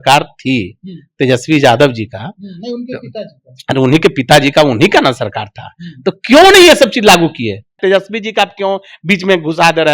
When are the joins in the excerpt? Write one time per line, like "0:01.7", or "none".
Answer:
0:07.8